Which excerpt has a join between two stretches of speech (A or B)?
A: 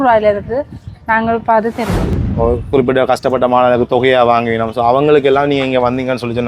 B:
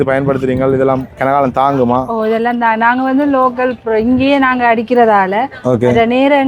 A